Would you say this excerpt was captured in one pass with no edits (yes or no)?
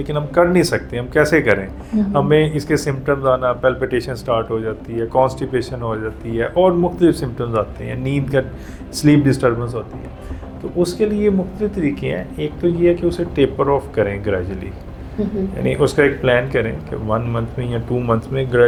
yes